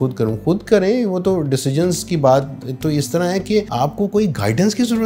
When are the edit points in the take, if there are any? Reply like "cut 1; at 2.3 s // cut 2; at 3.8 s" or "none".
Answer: cut 1; at 3.7 s